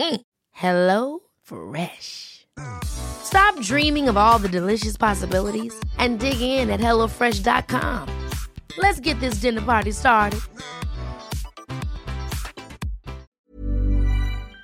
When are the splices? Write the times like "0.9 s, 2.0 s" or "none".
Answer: 13.5 s